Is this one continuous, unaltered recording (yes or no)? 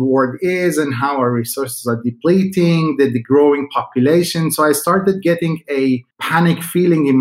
no